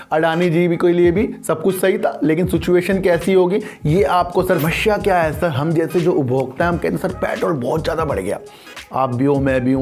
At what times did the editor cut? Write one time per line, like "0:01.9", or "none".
0:04.4

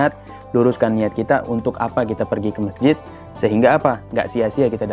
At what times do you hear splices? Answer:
none

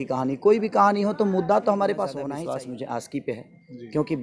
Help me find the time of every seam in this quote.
0:02.3

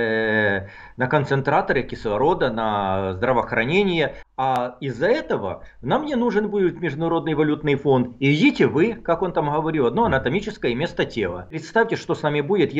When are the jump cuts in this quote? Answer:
0:04.6
0:11.6

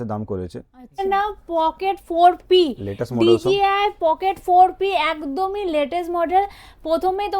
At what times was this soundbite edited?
0:01.0

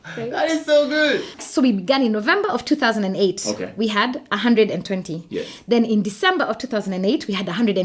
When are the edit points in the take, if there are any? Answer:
0:01.4

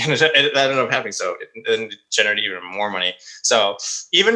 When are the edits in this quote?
none

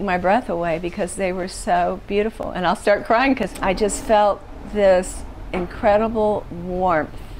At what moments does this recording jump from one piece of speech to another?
0:03.5

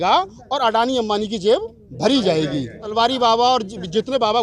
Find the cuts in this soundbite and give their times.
0:02.9

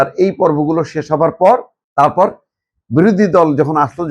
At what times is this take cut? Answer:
none

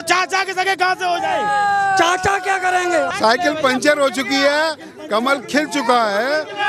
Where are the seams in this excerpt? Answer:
0:03.1

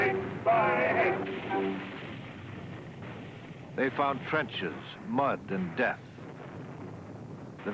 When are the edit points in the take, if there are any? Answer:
0:04.3

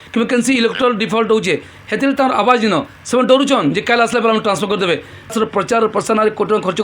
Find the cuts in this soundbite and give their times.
0:05.3

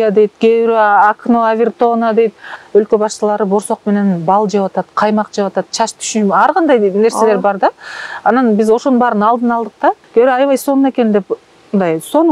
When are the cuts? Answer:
0:02.5
0:10.0

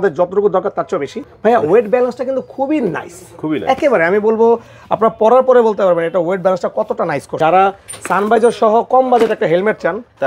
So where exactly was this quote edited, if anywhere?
0:01.2
0:07.3

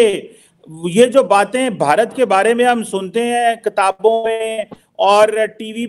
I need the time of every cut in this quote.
none

